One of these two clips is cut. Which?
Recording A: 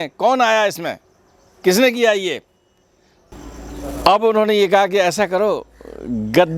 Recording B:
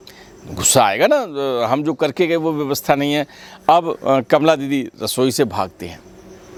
A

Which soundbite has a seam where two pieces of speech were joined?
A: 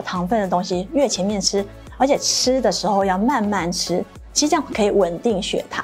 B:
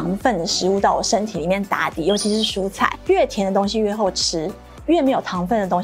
B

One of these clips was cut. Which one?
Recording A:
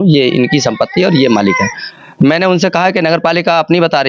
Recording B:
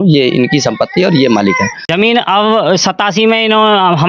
B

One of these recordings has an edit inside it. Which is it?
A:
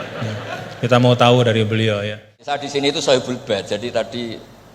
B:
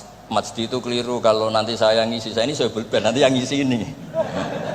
A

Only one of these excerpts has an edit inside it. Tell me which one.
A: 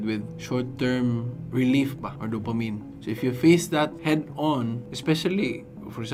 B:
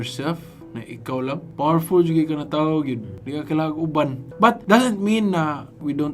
B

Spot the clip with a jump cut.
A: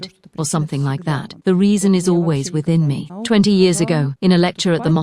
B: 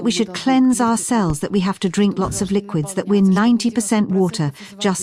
A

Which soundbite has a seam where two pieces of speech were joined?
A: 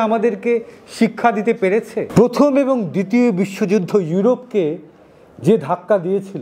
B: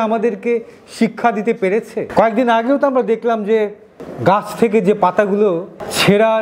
A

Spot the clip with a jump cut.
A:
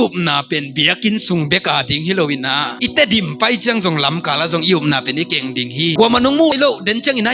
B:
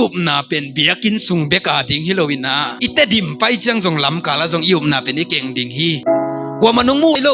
A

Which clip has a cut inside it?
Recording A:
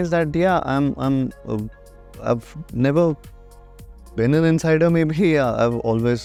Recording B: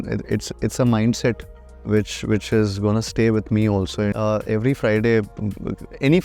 B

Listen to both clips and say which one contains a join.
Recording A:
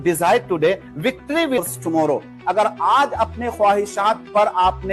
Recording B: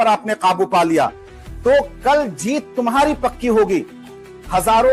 A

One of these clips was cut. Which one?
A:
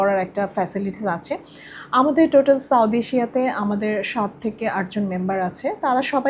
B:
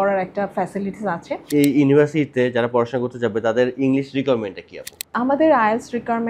B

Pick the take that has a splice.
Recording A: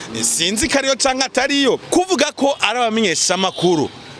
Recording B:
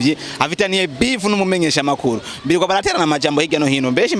A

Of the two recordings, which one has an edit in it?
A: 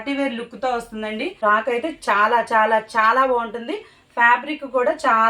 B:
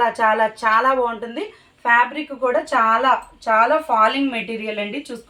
A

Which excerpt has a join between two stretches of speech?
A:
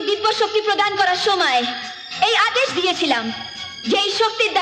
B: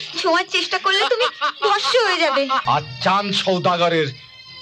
B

